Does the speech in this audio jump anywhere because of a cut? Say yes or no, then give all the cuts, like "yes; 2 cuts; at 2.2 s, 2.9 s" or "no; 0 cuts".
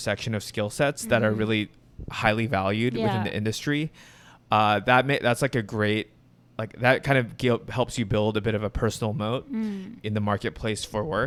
no; 0 cuts